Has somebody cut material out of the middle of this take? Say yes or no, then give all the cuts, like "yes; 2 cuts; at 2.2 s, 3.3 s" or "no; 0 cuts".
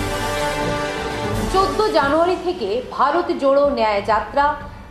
yes; 1 cut; at 1.5 s